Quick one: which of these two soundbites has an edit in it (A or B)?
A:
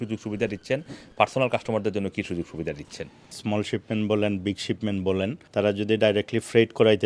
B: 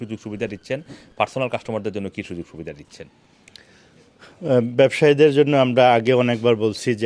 A